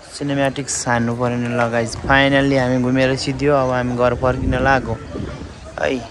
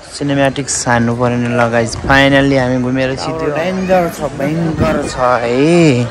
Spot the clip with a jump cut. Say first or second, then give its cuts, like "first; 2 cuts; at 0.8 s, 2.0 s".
second; 1 cut; at 3.2 s